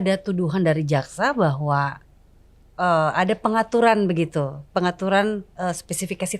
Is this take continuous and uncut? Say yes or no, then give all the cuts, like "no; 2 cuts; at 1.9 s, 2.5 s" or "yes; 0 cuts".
yes; 0 cuts